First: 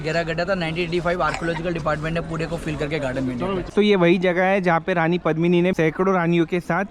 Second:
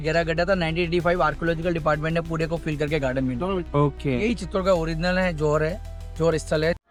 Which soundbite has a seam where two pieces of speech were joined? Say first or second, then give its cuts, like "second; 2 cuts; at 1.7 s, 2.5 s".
first; 2 cuts; at 3.7 s, 5.7 s